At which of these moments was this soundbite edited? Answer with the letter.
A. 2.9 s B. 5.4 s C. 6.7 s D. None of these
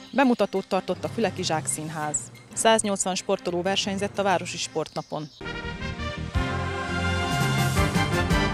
B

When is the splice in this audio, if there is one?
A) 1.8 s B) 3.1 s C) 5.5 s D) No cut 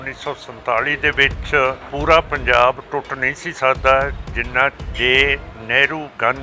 A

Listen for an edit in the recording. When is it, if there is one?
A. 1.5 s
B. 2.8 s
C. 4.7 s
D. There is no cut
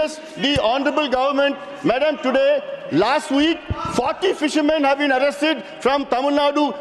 D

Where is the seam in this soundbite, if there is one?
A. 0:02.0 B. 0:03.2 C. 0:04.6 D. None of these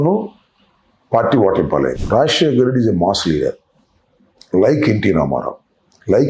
A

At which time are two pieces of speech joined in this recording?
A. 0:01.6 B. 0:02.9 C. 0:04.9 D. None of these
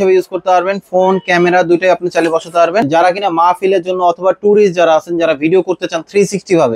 B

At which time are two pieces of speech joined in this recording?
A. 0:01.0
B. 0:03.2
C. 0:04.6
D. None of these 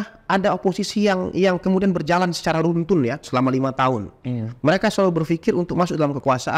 D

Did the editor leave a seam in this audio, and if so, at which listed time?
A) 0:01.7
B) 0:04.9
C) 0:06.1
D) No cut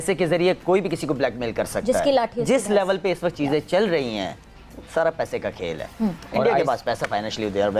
D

